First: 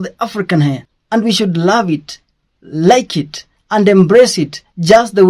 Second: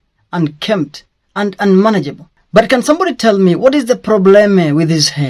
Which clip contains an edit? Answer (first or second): first